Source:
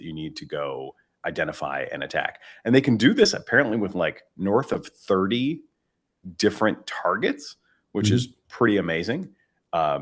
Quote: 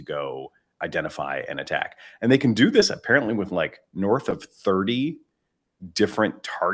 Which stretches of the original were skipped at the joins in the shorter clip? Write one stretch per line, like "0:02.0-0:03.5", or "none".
none